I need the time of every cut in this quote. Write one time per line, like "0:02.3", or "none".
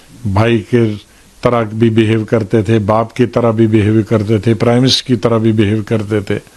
none